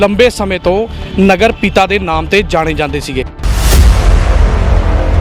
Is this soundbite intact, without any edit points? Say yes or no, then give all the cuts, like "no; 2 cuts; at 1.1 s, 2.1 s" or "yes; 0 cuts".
no; 1 cut; at 3.4 s